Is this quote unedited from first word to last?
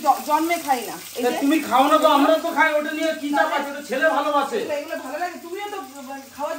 yes; 0 cuts

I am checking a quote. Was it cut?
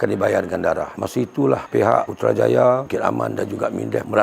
yes; 1 cut; at 0.9 s

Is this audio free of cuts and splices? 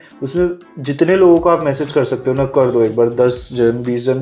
yes; 0 cuts

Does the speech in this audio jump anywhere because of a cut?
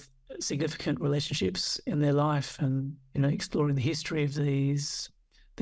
no; 0 cuts

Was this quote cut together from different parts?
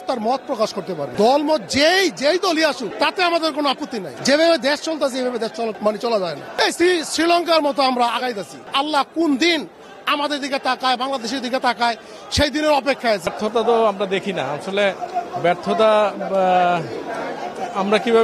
yes; 7 cuts; at 1.1 s, 2.9 s, 4.1 s, 5.8 s, 6.5 s, 8.6 s, 13.3 s

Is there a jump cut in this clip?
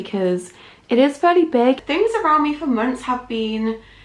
yes; 1 cut; at 1.8 s

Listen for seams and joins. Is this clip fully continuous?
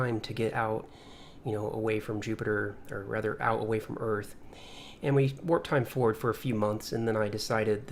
yes; 0 cuts

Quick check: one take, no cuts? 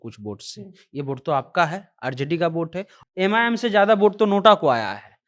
no; 1 cut; at 2.9 s

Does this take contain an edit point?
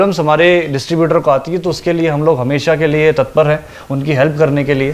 no; 0 cuts

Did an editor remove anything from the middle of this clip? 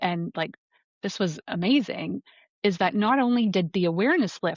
no; 0 cuts

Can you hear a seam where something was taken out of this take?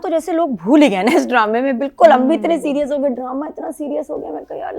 no; 0 cuts

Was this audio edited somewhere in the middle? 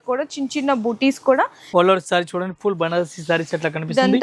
yes; 1 cut; at 1.6 s

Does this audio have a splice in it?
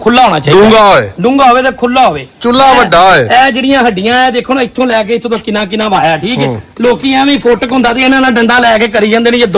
no; 0 cuts

